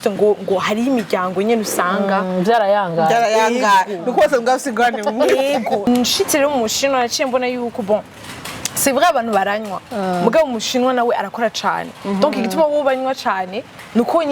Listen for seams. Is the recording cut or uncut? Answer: cut